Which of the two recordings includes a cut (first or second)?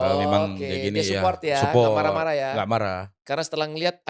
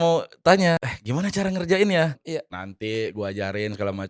second